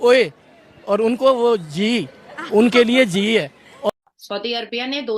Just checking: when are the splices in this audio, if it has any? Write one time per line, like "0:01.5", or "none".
0:03.9